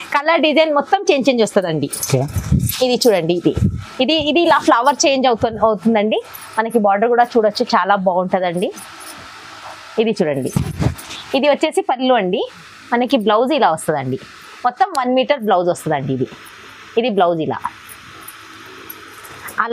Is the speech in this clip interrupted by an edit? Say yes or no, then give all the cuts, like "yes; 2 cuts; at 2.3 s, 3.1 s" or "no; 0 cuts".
no; 0 cuts